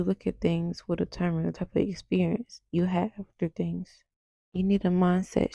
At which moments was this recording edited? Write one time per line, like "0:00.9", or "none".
none

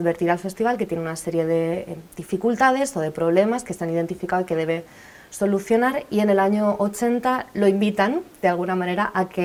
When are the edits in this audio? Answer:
none

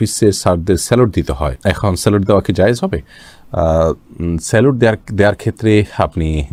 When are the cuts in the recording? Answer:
none

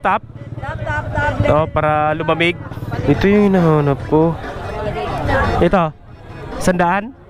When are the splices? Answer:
0:03.0
0:05.3

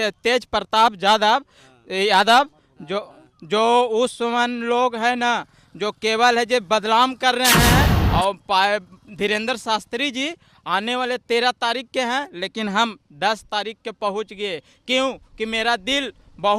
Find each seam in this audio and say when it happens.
0:08.0

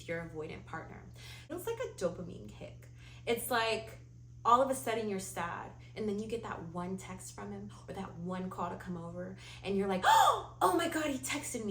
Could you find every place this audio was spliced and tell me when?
0:01.5

